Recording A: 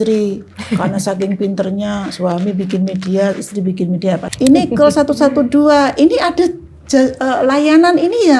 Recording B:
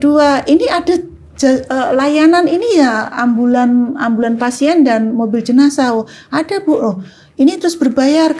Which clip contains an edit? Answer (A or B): A